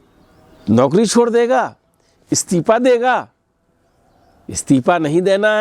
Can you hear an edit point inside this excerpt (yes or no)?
no